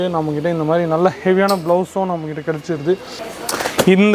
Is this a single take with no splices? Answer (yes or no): no